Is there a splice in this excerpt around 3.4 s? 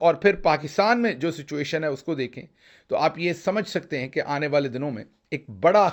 no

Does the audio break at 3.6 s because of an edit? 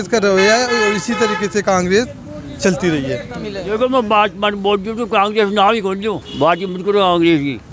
yes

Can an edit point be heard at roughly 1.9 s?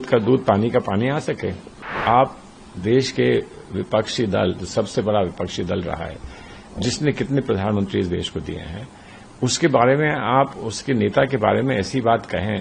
yes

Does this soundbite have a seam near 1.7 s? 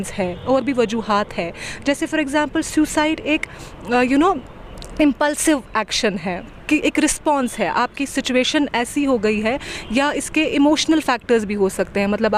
no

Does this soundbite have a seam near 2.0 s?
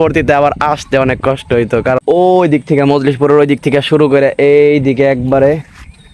yes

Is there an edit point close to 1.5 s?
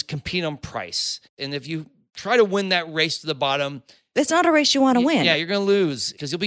yes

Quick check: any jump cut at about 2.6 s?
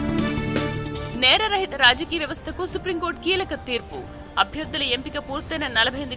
no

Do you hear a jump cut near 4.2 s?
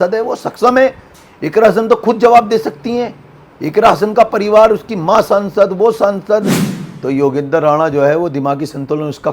no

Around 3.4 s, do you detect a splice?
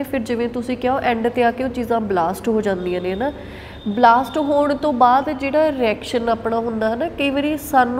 no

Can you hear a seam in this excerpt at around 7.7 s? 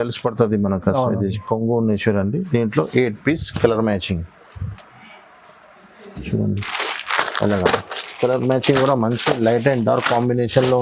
no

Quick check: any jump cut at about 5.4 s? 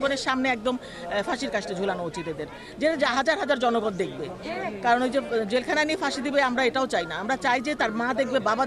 no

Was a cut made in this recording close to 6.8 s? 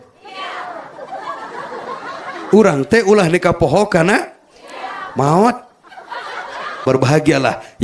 yes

